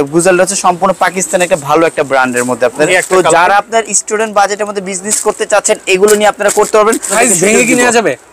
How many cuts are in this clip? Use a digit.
2